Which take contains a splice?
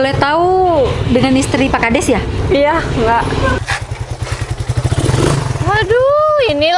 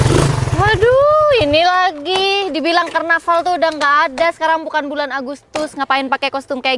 first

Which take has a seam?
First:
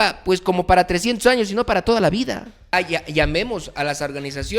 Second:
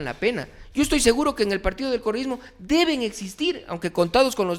first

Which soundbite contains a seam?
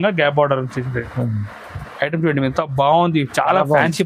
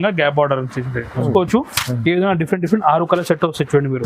second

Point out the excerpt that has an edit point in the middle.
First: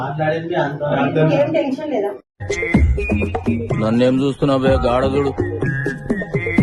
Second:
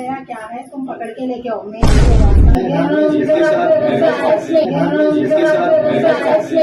second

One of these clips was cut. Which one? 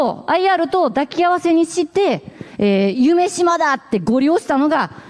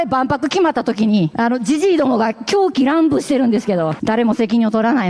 second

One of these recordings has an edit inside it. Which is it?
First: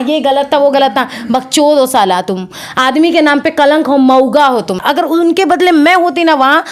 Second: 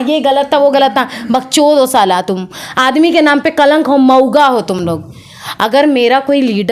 first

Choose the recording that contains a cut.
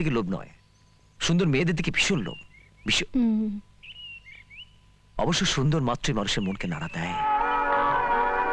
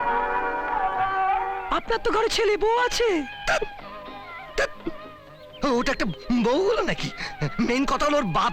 second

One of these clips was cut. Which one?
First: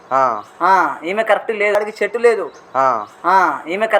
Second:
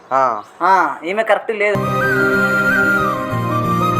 second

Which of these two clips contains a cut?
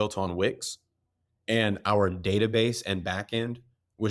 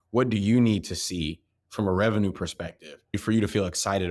second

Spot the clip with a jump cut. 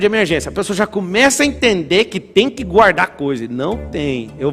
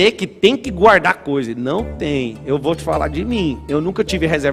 second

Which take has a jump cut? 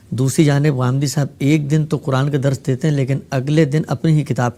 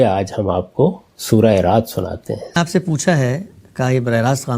second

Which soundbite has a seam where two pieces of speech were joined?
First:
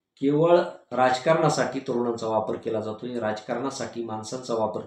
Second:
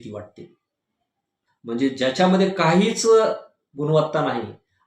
second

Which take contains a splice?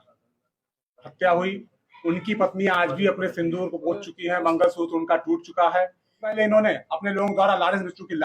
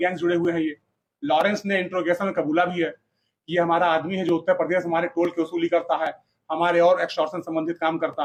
first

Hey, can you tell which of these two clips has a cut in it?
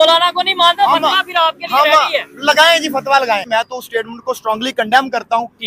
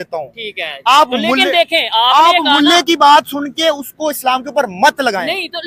first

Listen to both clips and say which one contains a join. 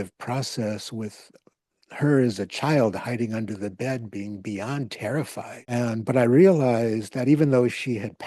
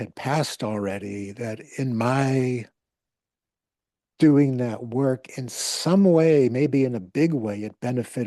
first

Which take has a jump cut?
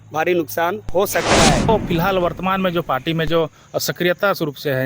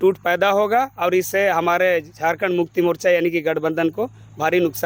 first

